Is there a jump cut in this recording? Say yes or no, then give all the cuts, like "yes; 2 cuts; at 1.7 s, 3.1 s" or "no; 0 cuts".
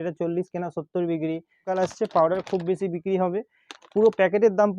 yes; 1 cut; at 1.7 s